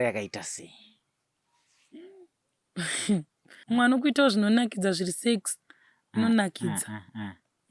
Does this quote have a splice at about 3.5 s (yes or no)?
yes